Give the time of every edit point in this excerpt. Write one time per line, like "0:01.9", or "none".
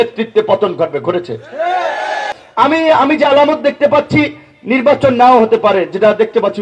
0:02.3